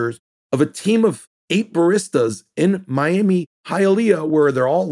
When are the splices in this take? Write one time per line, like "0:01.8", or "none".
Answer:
none

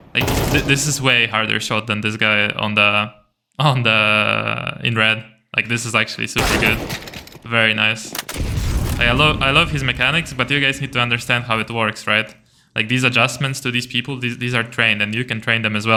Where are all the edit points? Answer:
none

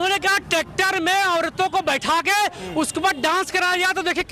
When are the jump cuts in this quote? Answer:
none

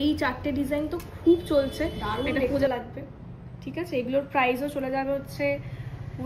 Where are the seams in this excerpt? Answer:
0:02.7

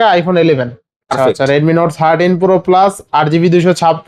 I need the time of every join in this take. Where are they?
0:01.1

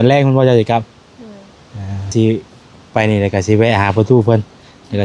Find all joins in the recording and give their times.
0:02.1

